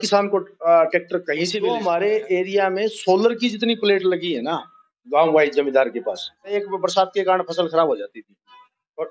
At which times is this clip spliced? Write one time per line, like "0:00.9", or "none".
0:01.5
0:06.5